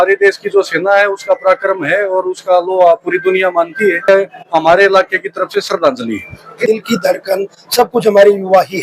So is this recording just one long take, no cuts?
no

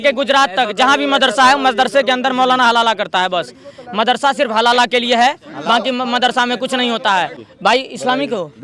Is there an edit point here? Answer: yes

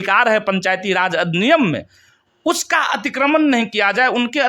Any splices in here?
no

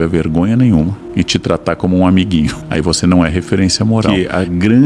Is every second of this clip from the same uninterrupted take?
no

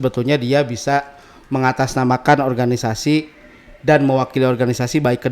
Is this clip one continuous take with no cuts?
yes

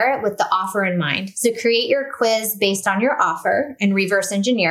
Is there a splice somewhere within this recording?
yes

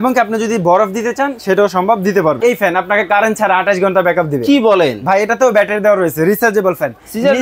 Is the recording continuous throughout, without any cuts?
no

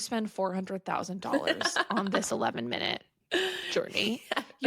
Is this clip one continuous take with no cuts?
no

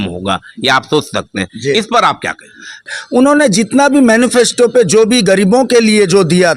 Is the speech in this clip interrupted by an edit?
yes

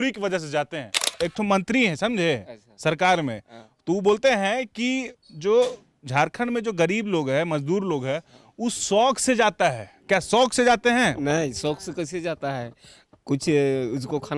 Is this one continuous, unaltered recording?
no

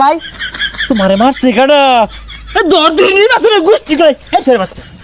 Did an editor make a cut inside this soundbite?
no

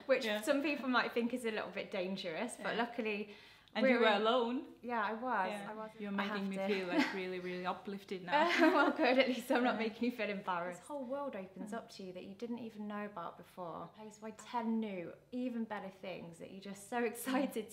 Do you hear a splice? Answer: yes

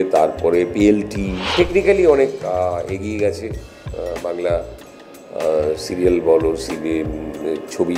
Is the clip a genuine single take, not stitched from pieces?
no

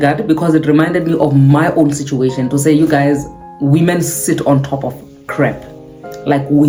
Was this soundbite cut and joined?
no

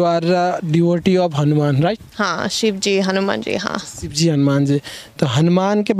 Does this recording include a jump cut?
no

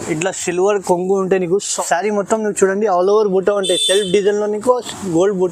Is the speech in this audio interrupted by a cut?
yes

